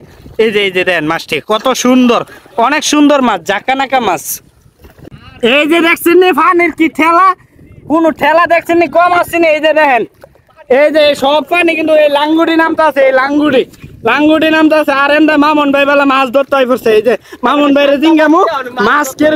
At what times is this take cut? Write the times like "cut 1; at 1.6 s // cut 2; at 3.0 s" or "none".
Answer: none